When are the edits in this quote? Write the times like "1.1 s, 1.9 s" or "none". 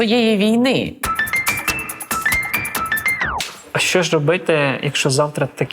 1.0 s, 3.6 s